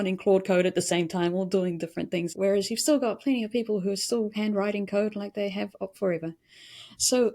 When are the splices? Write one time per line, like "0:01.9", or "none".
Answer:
0:02.3

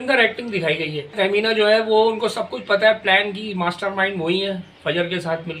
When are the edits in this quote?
0:01.1

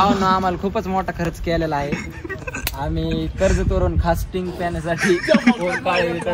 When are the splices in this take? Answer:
none

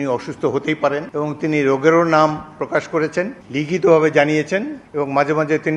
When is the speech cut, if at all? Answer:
0:01.1
0:03.4
0:04.8

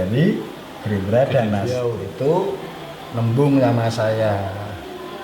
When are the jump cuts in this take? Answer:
0:01.8

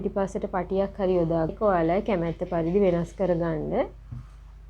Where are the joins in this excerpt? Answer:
0:01.5

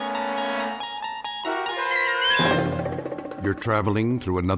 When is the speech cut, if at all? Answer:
0:03.2

